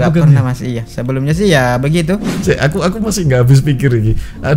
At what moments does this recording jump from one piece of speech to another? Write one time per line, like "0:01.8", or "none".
0:02.3